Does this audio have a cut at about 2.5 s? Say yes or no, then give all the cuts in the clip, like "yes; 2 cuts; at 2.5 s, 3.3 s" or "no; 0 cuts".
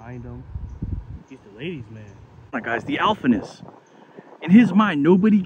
yes; 1 cut; at 2.5 s